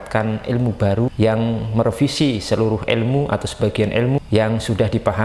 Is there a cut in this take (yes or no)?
yes